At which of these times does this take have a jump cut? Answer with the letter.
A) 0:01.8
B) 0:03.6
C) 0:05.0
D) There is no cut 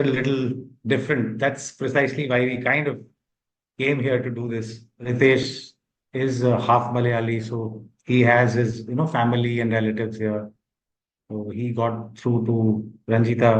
C